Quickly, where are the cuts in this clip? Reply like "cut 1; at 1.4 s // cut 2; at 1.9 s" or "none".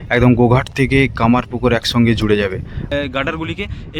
cut 1; at 2.8 s